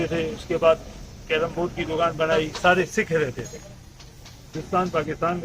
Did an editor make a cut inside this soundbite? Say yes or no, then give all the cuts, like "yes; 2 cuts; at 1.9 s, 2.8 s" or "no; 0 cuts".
yes; 2 cuts; at 2.5 s, 4.5 s